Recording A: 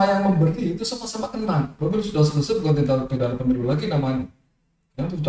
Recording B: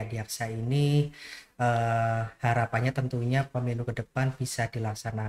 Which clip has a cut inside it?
A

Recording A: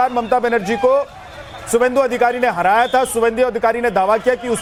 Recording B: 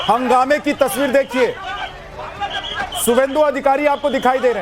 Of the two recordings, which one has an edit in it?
B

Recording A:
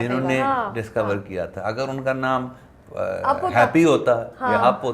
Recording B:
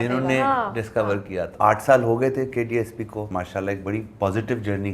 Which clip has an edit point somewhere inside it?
B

